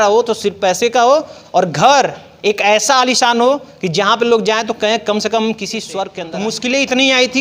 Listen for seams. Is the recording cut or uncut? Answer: cut